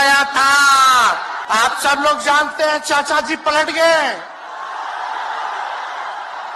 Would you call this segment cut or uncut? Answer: cut